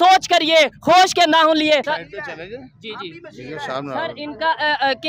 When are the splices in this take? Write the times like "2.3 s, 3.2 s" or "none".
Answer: 1.9 s